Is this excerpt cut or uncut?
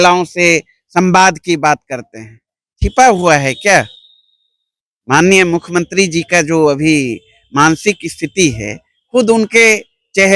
uncut